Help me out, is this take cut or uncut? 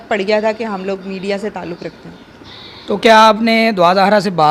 uncut